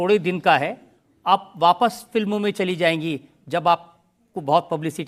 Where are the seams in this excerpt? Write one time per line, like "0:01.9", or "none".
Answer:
none